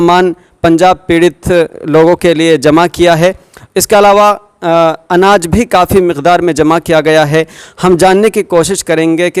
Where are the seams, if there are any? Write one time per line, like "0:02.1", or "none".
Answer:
none